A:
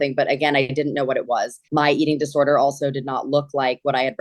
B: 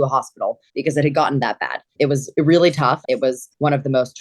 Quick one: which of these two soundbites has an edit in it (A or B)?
B